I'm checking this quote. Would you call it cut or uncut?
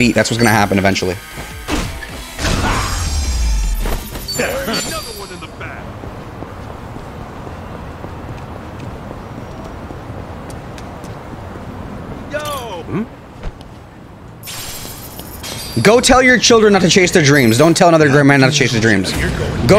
uncut